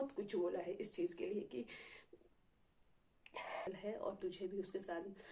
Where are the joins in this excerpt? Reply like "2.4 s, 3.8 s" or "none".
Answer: 3.7 s